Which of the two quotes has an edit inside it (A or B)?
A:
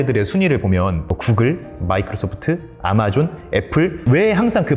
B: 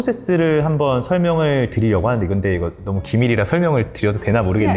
A